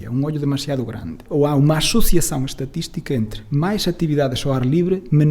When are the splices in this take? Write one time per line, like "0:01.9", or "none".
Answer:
0:01.2